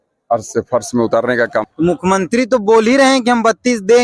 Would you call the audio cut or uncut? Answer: cut